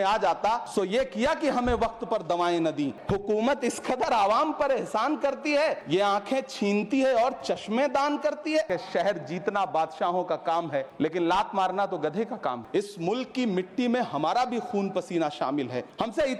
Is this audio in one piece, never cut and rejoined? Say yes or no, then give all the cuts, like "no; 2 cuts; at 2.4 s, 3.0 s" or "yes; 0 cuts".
no; 3 cuts; at 3.0 s, 8.7 s, 12.6 s